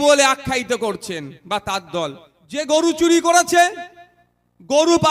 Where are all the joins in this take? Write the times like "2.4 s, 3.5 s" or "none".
2.6 s